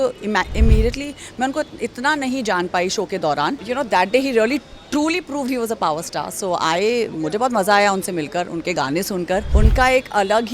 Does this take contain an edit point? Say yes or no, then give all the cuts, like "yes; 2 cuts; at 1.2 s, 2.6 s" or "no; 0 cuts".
yes; 2 cuts; at 3.6 s, 9.5 s